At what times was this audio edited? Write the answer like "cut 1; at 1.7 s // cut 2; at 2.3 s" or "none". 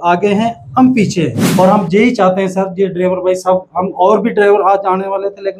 cut 1; at 1.4 s